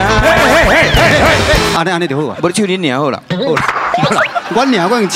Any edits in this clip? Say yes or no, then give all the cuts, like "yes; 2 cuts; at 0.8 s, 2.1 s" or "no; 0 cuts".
yes; 1 cut; at 1.7 s